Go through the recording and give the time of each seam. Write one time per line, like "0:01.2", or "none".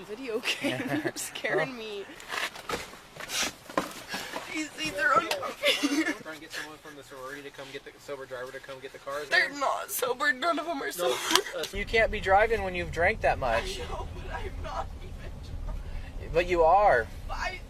0:02.1
0:06.2
0:09.3
0:11.7